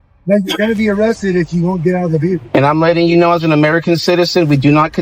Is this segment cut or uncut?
cut